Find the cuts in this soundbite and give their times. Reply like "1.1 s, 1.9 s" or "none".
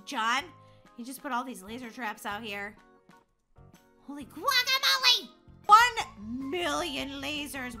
5.7 s